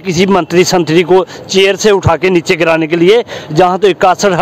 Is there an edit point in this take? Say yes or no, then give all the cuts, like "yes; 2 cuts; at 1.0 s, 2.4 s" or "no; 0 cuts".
no; 0 cuts